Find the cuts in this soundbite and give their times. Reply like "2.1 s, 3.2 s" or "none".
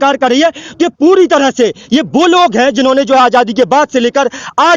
none